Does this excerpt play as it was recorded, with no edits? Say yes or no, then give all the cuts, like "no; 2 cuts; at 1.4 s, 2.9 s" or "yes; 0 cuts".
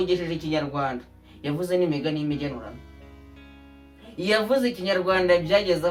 yes; 0 cuts